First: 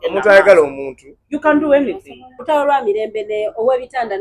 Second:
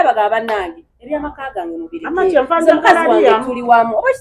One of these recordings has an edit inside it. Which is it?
first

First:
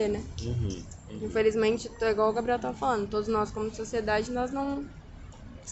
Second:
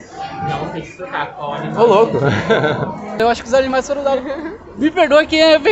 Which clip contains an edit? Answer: second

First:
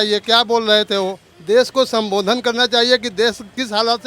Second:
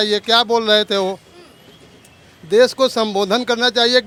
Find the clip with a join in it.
first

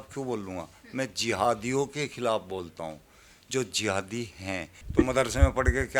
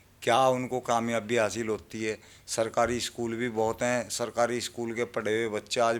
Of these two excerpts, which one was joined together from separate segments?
first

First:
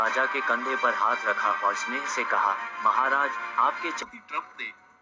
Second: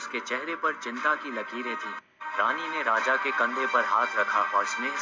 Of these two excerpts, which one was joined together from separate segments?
first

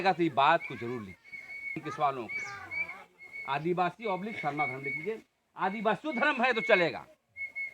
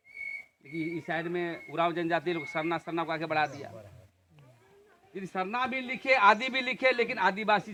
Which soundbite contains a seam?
first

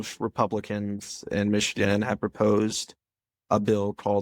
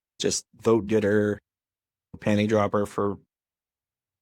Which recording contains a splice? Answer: second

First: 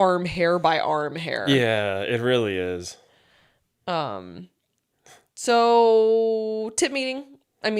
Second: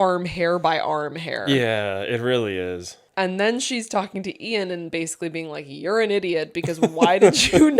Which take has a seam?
second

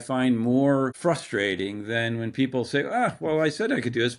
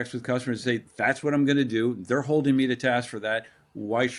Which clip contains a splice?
first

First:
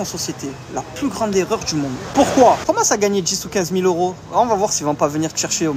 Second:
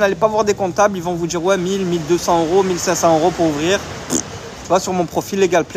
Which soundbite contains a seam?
first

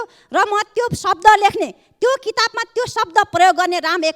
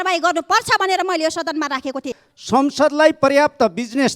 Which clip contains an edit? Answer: second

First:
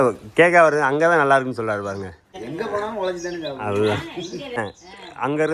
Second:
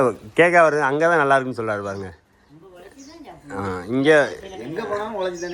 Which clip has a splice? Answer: first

